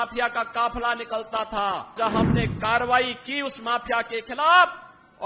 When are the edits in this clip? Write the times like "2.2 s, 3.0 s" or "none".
1.9 s

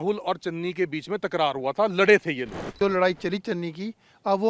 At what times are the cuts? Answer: 2.7 s

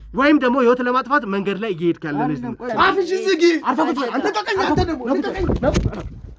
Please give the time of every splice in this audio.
2.7 s

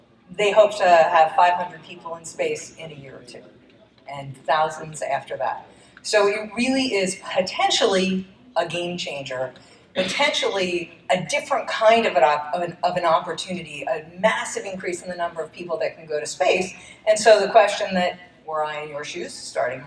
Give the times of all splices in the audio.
5.7 s

